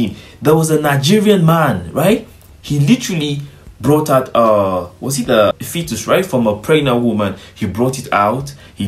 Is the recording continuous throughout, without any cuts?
yes; 0 cuts

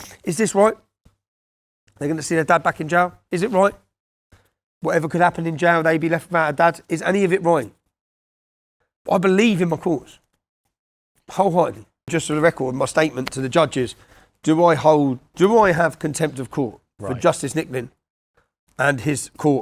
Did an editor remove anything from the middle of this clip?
yes; 1 cut; at 12.1 s

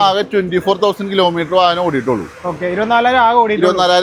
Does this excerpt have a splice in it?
no; 0 cuts

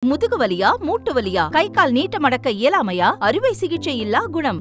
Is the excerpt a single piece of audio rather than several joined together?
yes; 0 cuts

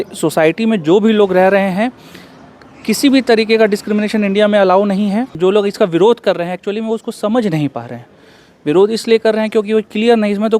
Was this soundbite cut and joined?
yes; 1 cut; at 5.3 s

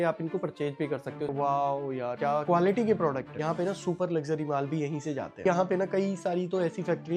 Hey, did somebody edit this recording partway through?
yes; 3 cuts; at 1.3 s, 3.3 s, 5.4 s

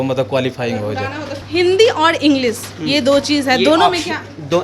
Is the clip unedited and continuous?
no; 1 cut; at 1.3 s

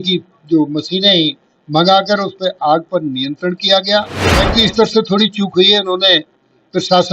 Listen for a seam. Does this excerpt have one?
yes; 1 cut; at 4.5 s

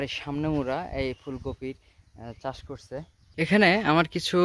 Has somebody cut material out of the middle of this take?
yes; 1 cut; at 3.2 s

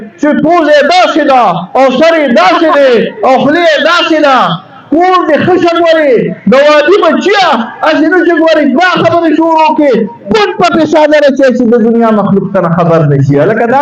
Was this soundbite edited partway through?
no; 0 cuts

